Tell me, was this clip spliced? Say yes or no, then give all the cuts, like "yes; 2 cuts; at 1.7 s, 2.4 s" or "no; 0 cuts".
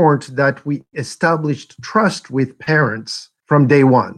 yes; 1 cut; at 3.3 s